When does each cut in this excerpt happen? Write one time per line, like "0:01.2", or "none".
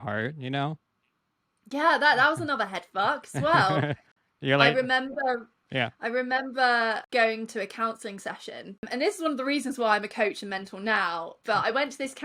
none